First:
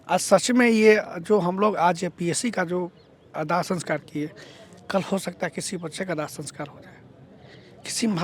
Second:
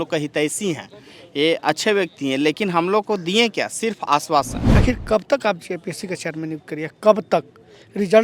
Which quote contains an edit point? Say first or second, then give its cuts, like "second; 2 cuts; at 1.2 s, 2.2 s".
second; 1 cut; at 4.6 s